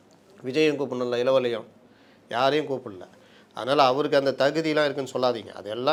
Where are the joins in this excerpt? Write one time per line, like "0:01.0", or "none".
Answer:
none